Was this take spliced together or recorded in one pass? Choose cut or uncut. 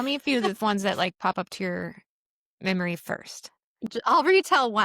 cut